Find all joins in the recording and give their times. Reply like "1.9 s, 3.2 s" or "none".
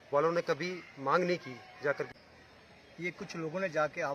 2.1 s